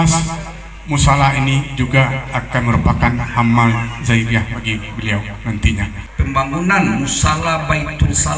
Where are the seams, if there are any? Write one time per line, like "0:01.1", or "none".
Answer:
0:06.0